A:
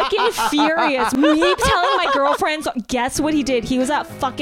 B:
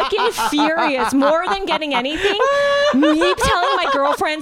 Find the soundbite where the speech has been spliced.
A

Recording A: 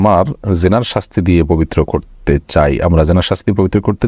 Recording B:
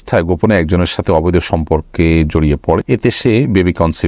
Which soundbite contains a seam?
B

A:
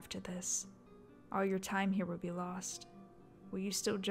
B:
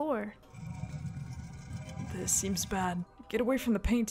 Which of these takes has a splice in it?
B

